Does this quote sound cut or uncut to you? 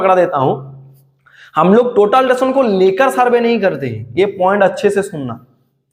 uncut